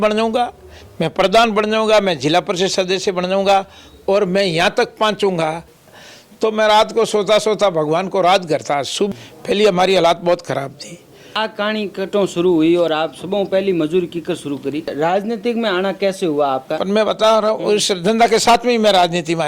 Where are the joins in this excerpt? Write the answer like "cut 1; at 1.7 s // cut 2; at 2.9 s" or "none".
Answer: cut 1; at 5.9 s // cut 2; at 9.1 s // cut 3; at 11.2 s // cut 4; at 14.9 s